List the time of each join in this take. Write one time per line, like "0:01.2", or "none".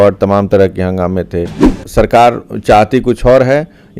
0:01.8